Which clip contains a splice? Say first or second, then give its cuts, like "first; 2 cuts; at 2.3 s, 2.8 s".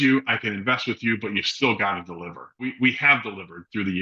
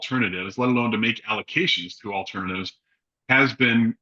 first; 1 cut; at 2.7 s